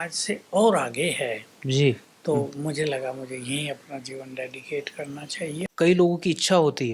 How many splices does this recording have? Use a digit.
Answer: 1